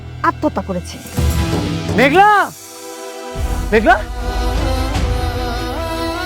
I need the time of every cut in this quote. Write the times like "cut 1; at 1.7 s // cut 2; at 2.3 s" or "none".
cut 1; at 1.9 s // cut 2; at 3.5 s